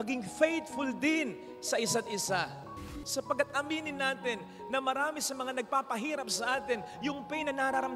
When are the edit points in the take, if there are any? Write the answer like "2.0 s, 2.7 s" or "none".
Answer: 2.9 s